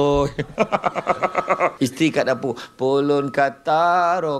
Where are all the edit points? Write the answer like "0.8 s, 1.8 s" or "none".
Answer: 1.7 s